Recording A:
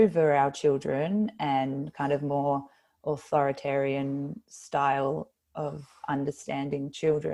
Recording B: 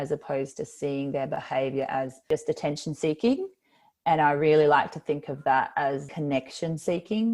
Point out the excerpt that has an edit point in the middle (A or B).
B